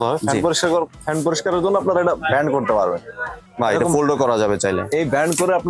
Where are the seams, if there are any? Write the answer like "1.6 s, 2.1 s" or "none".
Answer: none